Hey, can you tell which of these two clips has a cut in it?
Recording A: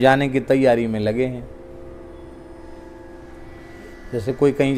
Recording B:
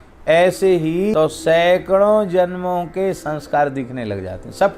B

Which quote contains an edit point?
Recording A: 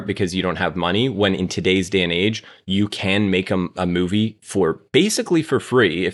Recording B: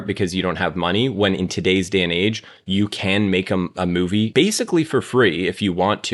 B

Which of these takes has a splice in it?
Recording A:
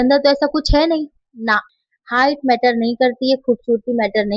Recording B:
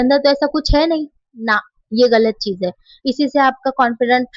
A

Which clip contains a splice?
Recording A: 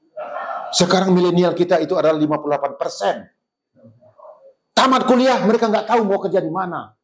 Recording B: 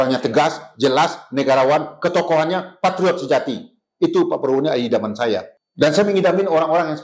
B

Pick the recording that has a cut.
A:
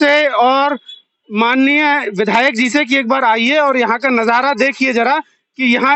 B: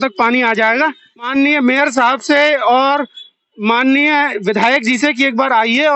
B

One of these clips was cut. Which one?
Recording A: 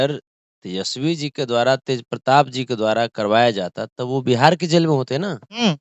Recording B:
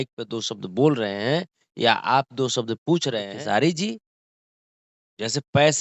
B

